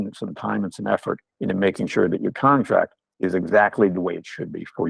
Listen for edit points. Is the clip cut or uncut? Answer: cut